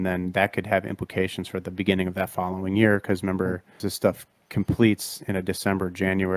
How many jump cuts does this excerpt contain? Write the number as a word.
one